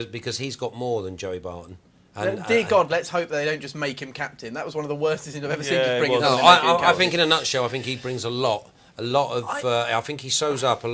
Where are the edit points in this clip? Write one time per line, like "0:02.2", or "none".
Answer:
0:04.0